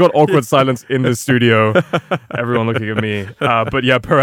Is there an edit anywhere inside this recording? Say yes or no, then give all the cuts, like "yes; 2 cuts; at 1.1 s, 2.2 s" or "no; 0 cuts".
no; 0 cuts